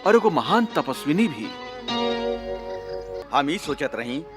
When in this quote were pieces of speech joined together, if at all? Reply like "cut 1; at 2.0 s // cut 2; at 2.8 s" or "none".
cut 1; at 3.1 s